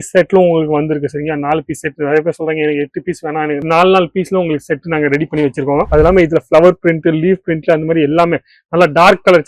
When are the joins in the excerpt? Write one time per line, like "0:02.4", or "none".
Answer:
0:05.9